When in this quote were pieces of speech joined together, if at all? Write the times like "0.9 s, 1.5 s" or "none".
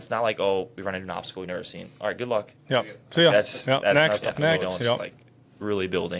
5.1 s

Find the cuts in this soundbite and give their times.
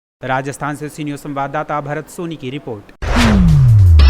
3.0 s

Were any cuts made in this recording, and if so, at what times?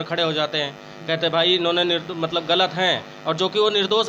none

